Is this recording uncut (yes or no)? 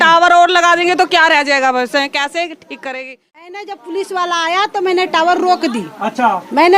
no